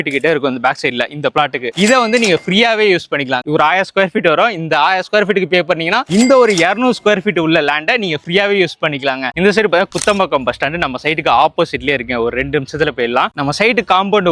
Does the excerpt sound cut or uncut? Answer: cut